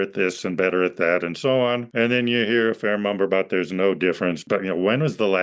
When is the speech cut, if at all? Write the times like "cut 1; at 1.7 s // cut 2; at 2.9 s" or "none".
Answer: cut 1; at 1.9 s // cut 2; at 4.4 s